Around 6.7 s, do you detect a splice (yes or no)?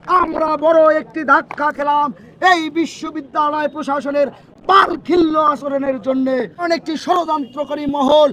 yes